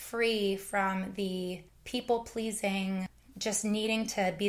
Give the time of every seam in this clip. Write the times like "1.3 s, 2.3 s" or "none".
1.7 s, 3.2 s